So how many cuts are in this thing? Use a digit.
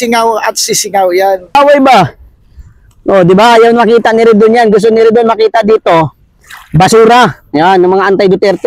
1